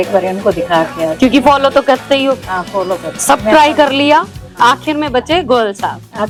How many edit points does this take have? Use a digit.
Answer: 0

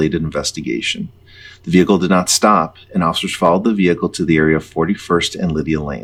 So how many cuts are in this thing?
0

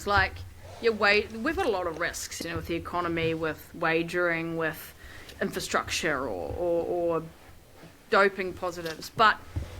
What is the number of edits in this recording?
3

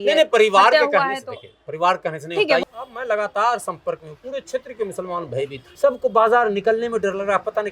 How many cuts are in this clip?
2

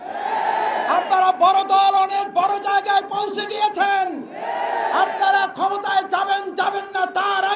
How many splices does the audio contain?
0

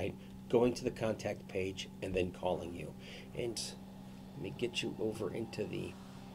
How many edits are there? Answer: 1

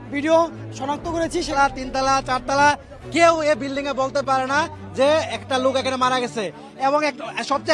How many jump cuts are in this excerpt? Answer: 1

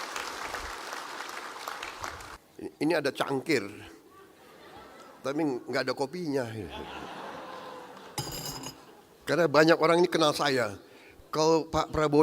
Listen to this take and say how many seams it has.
1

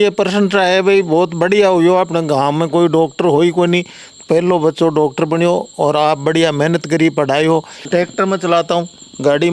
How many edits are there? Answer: 1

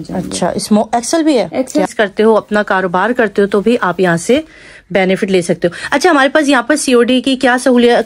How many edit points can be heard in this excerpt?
1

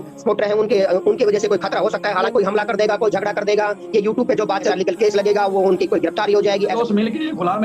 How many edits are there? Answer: 3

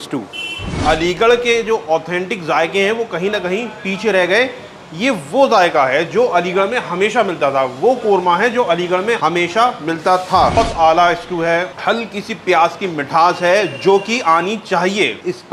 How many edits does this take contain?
2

